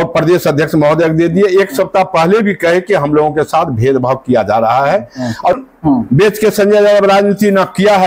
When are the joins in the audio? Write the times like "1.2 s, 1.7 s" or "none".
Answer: 5.5 s